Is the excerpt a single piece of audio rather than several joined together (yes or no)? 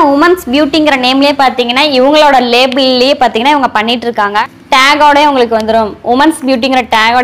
no